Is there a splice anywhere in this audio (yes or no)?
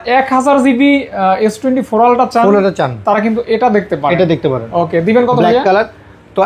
no